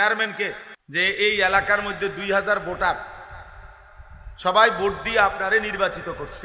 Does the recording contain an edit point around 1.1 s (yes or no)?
yes